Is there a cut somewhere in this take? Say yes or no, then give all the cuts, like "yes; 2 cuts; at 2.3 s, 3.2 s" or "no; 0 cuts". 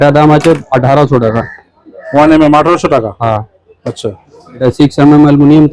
no; 0 cuts